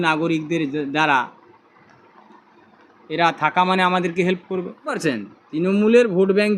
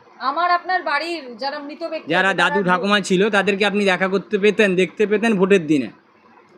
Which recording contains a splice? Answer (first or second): first